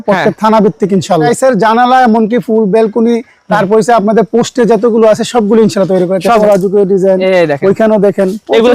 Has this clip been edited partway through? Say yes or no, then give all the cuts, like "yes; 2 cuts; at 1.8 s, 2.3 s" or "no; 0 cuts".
yes; 2 cuts; at 1.3 s, 6.4 s